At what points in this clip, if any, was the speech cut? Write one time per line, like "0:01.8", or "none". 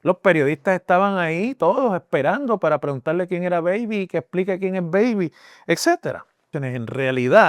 0:06.5